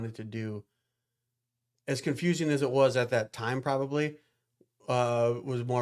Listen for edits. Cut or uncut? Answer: uncut